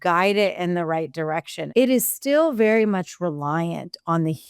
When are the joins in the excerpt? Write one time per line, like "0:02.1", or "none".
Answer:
0:01.5